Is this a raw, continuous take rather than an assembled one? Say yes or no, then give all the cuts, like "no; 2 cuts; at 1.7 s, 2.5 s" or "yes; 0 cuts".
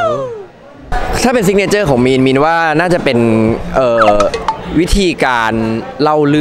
no; 1 cut; at 0.9 s